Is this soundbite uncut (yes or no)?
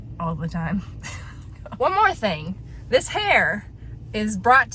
yes